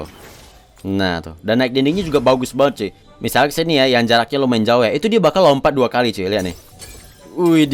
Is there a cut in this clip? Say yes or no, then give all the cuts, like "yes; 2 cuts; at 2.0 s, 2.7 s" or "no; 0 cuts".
no; 0 cuts